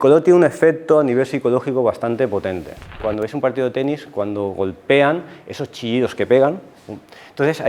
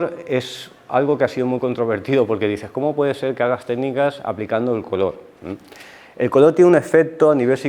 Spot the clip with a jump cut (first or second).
first